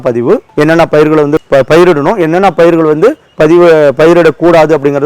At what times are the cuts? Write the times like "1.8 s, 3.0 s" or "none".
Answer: 1.4 s